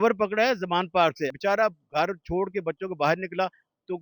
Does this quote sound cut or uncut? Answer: cut